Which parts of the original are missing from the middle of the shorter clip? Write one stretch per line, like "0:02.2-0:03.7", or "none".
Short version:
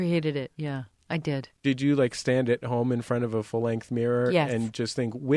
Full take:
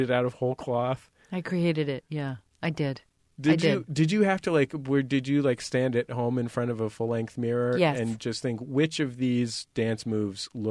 0:03.1-0:05.1